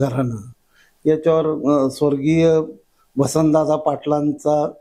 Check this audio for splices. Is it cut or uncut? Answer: uncut